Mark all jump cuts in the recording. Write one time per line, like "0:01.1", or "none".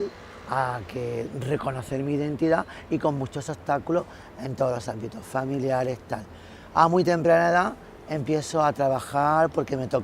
0:05.7